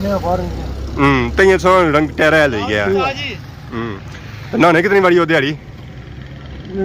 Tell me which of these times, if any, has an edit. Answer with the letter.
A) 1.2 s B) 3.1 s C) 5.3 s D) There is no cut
D